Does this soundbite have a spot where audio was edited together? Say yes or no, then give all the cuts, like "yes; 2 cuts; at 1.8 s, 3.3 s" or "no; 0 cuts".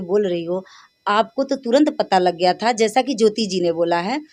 no; 0 cuts